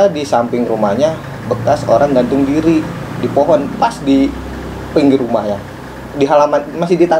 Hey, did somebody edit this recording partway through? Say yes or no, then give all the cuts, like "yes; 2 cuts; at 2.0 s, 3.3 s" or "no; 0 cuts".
no; 0 cuts